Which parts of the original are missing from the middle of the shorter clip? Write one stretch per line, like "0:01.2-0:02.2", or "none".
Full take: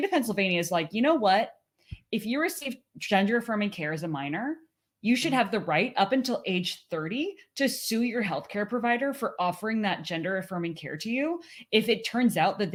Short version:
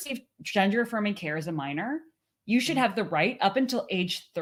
none